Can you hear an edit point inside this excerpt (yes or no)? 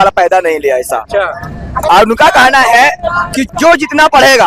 yes